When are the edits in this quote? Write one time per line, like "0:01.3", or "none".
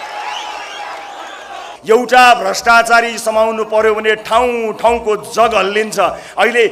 0:01.7

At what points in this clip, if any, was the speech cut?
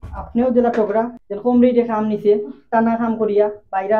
0:01.2

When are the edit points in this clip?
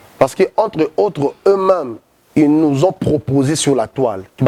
none

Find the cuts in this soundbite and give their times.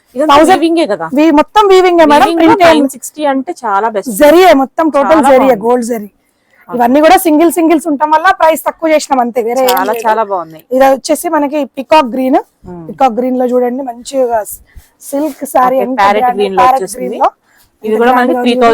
none

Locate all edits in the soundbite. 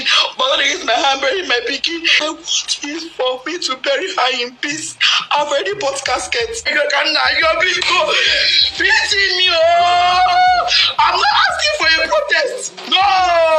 0:02.2
0:06.7

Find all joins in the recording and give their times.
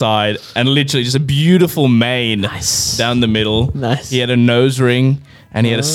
none

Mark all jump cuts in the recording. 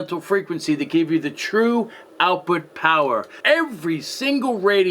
0:03.3

